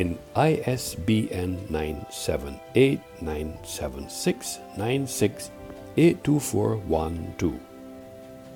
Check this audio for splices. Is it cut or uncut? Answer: cut